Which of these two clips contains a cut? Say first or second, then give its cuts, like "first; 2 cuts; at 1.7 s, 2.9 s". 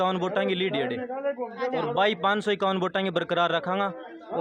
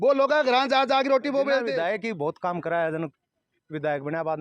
second; 1 cut; at 1.7 s